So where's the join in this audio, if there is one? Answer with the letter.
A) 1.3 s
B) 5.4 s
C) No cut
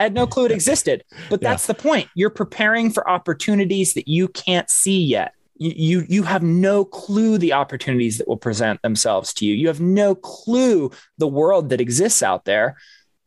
B